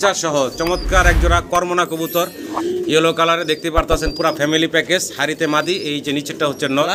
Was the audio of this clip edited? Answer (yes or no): no